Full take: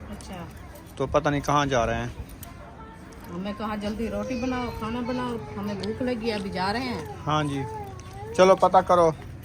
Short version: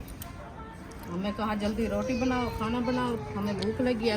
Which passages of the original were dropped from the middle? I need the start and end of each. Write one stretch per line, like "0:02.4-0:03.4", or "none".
none